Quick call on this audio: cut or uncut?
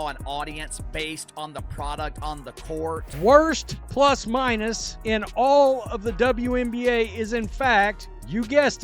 cut